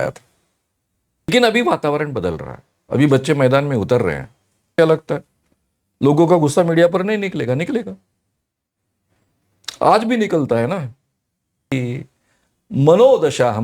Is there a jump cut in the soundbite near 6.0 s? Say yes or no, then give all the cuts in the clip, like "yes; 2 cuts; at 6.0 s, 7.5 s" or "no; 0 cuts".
no; 3 cuts; at 1.3 s, 4.7 s, 11.7 s